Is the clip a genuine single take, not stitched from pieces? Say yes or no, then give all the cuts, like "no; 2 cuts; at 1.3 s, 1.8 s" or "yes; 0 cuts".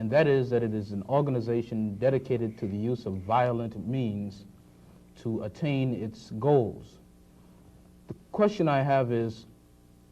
no; 1 cut; at 4.6 s